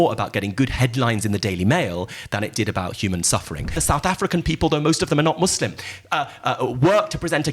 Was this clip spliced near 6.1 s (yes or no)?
no